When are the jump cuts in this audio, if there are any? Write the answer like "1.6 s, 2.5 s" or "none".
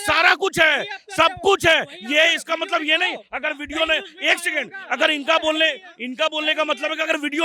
none